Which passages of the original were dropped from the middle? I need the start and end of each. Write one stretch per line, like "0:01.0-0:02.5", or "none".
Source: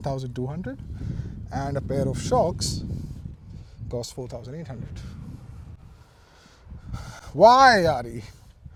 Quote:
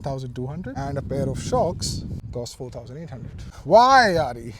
0:00.7-0:01.5
0:03.0-0:03.8
0:05.0-0:07.2